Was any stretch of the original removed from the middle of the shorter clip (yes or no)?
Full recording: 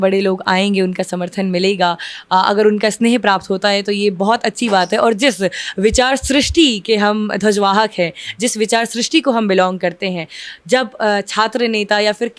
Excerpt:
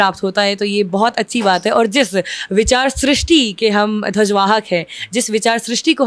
no